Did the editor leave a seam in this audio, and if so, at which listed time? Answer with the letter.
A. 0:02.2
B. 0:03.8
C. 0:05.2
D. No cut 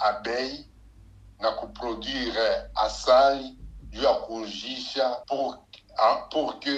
C